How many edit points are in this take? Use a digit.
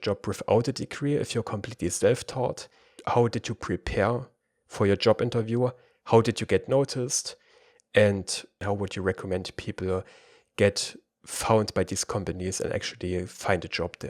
2